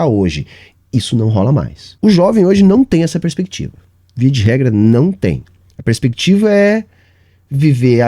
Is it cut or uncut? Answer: cut